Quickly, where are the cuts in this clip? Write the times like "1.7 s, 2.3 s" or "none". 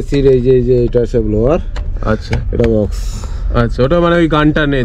none